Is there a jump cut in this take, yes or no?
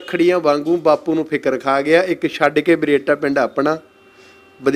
no